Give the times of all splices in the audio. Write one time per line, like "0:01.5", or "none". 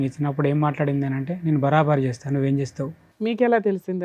0:03.0